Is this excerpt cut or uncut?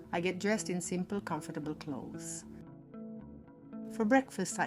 cut